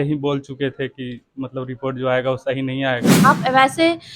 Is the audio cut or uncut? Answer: cut